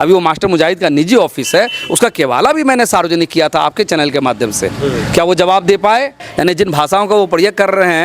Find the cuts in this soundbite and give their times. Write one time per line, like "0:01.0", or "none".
0:06.2

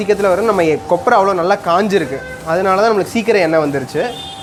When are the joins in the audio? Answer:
none

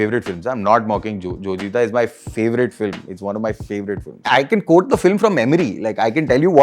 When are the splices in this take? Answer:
0:04.2

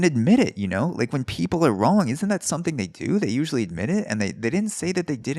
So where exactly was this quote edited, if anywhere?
none

